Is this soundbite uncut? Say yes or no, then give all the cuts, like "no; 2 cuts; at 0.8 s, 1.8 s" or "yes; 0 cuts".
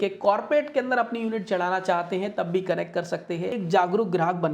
no; 1 cut; at 3.6 s